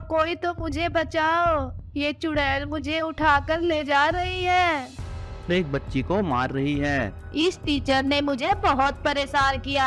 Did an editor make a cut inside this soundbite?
yes; 2 cuts; at 5.5 s, 7.2 s

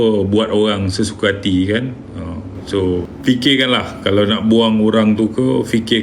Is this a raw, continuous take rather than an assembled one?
no; 1 cut; at 3.1 s

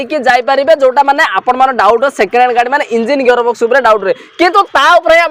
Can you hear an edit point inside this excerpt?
no; 0 cuts

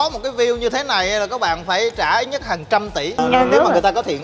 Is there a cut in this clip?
yes; 1 cut; at 3.2 s

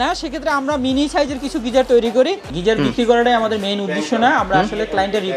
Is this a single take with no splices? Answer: no; 1 cut; at 2.5 s

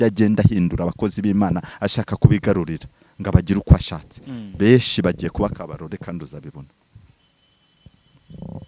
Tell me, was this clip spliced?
no; 0 cuts

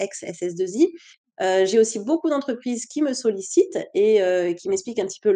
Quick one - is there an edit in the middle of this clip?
no; 0 cuts

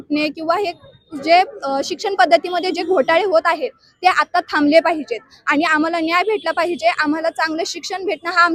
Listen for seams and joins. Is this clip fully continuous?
yes; 0 cuts

